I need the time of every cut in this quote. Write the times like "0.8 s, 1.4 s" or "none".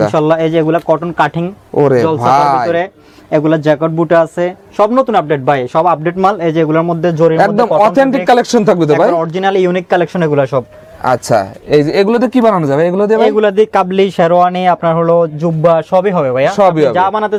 none